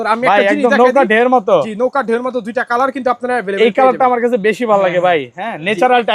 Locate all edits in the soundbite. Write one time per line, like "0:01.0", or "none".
none